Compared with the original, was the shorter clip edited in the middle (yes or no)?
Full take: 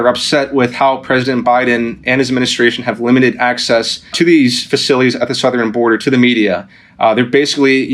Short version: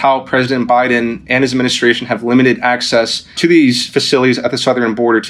no